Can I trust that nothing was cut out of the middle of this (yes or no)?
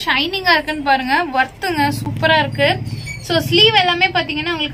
yes